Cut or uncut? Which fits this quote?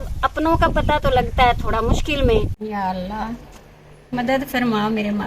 cut